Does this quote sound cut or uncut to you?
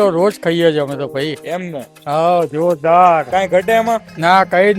uncut